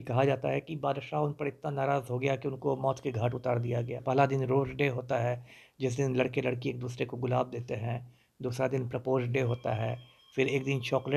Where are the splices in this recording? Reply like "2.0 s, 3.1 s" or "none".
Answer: 4.0 s